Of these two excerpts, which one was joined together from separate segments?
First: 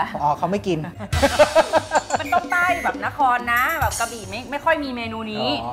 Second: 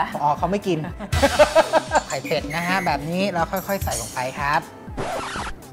second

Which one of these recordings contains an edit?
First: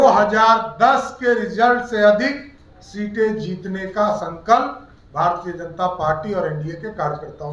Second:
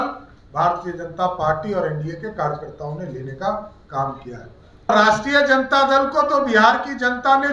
second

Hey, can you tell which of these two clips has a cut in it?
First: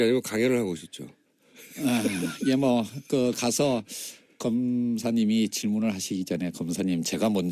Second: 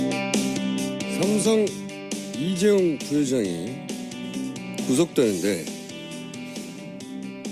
first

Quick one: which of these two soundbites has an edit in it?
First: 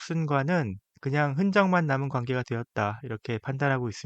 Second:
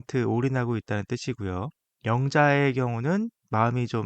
second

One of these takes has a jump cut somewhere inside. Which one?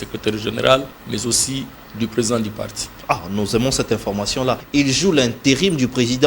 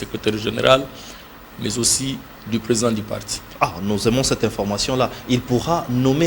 first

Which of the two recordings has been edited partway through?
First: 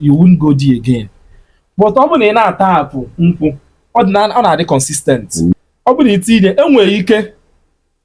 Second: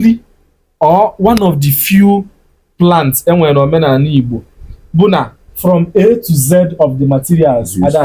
first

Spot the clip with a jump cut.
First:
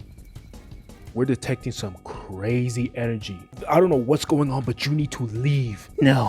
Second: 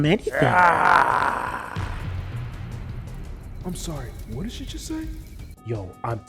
first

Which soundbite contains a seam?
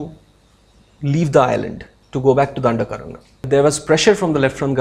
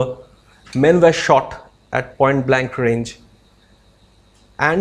first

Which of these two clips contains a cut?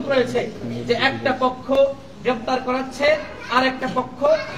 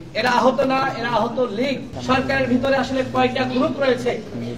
second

